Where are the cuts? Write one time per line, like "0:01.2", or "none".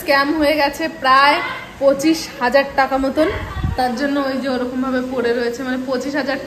none